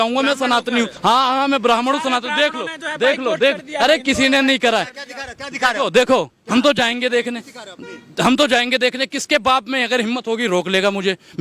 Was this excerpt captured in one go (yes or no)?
no